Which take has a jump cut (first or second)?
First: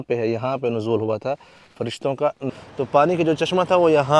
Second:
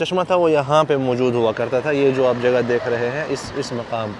first